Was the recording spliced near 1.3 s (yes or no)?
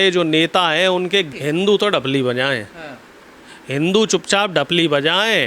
yes